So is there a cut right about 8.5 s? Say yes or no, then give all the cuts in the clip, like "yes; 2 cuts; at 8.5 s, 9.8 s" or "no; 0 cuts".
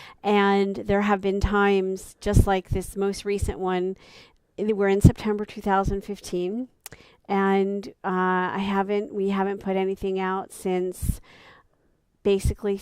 yes; 1 cut; at 8.5 s